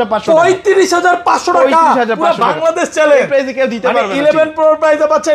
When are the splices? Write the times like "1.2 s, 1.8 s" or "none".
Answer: none

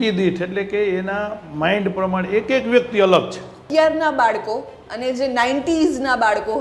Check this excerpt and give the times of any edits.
3.6 s

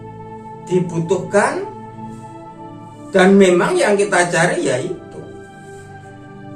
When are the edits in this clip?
none

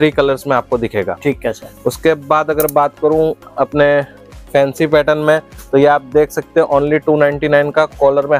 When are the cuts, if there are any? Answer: none

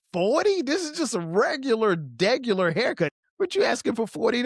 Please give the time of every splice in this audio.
3.1 s

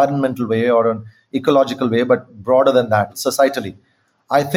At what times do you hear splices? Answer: 3.1 s

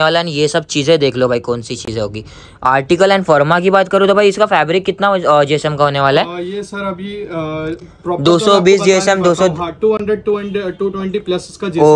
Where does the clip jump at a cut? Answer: none

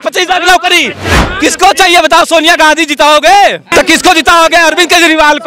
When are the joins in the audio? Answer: 1.2 s, 3.7 s

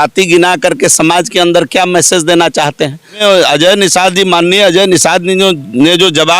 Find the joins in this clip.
3.2 s

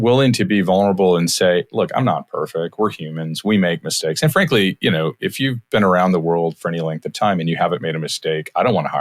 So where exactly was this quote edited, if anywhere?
none

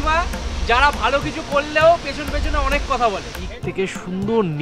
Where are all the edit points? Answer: 3.4 s

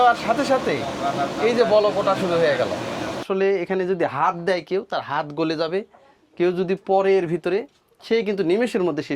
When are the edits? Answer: 3.2 s

